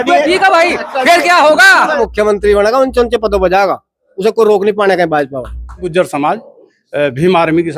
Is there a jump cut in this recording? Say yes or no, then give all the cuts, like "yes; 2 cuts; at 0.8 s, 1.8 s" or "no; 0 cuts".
yes; 2 cuts; at 2.0 s, 5.9 s